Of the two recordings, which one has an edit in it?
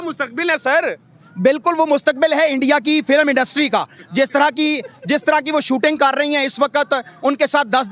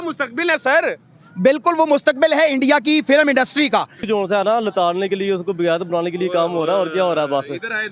second; 1 cut; at 4.0 s

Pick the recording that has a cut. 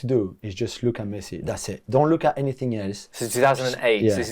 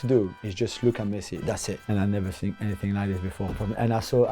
second; 1 cut; at 1.8 s

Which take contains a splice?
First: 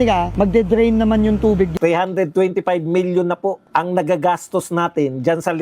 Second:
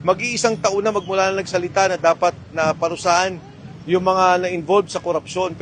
first; 2 cuts; at 1.7 s, 3.6 s

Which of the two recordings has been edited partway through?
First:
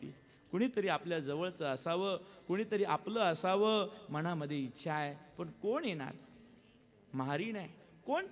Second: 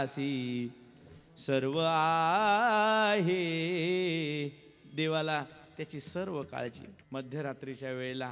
second; 1 cut; at 6.9 s

